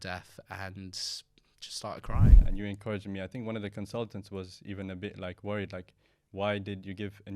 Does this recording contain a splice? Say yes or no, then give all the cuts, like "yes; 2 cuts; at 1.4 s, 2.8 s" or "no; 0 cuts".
yes; 1 cut; at 2.4 s